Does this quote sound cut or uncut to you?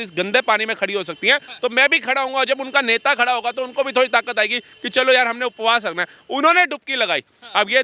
uncut